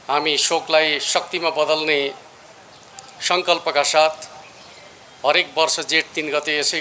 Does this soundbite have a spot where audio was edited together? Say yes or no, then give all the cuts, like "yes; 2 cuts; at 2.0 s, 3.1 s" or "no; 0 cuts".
no; 0 cuts